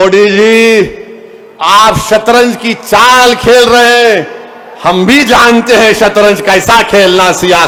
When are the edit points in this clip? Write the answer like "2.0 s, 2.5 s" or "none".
none